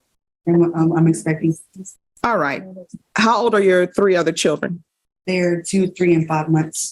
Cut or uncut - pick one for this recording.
uncut